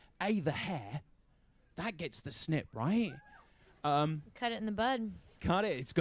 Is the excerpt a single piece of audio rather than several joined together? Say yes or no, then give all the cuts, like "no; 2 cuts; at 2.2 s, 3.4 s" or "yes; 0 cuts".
yes; 0 cuts